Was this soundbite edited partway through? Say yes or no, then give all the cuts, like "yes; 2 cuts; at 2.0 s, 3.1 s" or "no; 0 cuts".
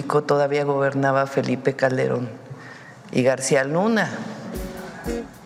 no; 0 cuts